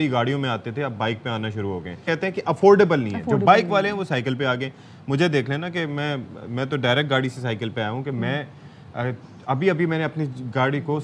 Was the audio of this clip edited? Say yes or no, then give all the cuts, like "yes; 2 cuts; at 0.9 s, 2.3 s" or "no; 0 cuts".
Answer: yes; 1 cut; at 2.0 s